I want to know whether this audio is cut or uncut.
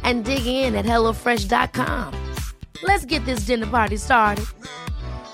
uncut